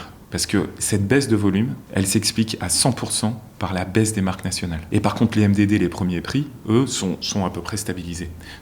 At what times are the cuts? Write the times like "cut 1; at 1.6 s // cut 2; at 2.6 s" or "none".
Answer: cut 1; at 1.8 s // cut 2; at 4.8 s